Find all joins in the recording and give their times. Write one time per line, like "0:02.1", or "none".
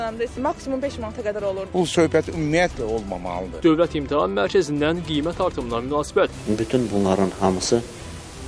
none